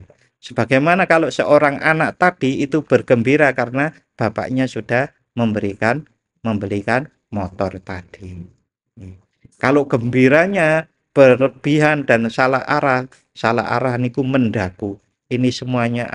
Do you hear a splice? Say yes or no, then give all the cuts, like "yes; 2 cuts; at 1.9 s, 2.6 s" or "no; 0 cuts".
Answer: yes; 1 cut; at 15.2 s